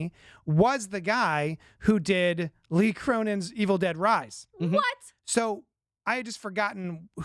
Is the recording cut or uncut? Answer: uncut